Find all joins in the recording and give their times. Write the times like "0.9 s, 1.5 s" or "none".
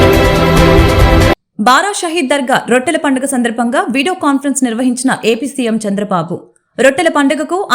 none